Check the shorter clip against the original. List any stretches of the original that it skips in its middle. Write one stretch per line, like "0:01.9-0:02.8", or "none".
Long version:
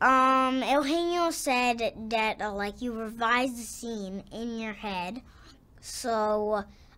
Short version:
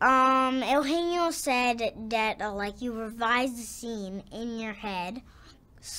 none